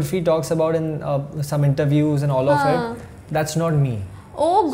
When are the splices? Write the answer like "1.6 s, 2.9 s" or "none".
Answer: none